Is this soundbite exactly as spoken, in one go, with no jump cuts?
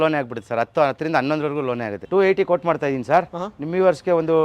no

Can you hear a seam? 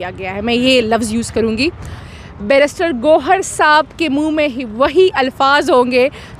yes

